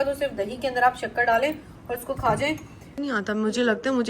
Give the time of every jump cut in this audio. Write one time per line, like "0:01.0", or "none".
0:03.0